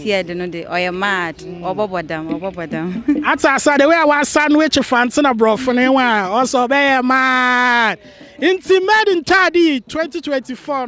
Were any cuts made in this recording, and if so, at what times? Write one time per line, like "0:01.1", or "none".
none